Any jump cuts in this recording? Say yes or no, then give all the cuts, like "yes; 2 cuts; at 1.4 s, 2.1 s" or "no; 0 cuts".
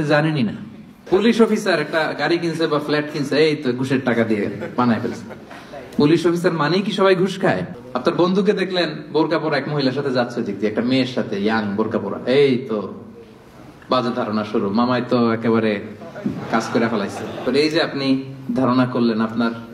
yes; 3 cuts; at 1.0 s, 7.8 s, 17.4 s